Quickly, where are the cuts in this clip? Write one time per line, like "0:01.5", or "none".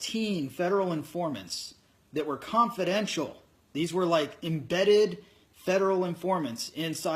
0:01.4